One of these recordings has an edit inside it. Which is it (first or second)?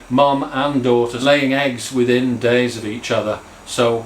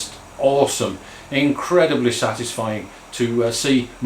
first